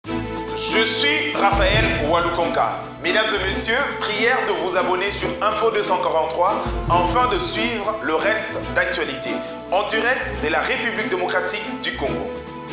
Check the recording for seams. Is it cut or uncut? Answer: uncut